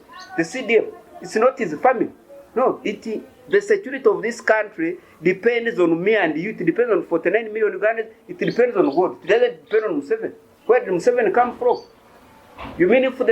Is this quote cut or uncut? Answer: uncut